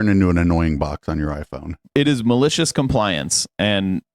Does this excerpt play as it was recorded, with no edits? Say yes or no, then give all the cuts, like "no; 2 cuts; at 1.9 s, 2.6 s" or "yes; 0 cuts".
no; 1 cut; at 1.8 s